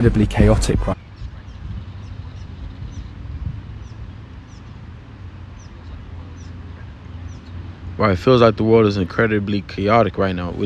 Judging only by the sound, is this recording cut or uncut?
uncut